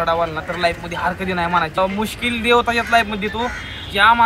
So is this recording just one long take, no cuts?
no; 1 cut; at 1.8 s

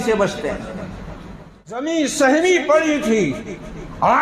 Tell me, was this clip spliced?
yes; 1 cut; at 1.8 s

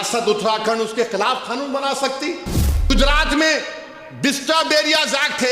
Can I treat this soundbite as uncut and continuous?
no; 1 cut; at 2.9 s

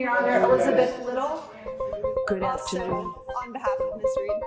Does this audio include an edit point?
no; 0 cuts

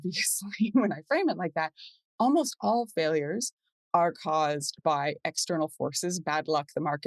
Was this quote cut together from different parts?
no; 0 cuts

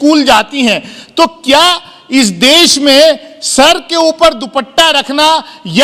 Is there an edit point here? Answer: no; 0 cuts

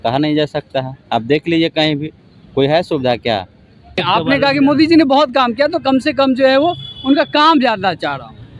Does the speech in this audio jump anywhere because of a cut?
yes; 1 cut; at 4.0 s

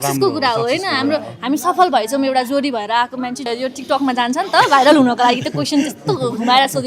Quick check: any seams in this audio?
yes; 1 cut; at 3.5 s

